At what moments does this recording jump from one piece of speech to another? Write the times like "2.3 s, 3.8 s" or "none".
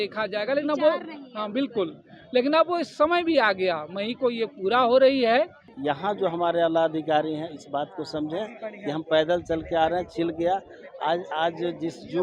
5.7 s